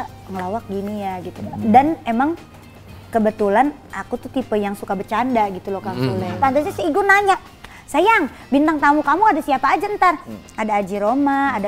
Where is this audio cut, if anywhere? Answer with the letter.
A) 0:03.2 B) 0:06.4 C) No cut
B